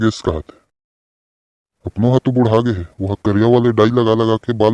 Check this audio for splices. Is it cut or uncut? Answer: uncut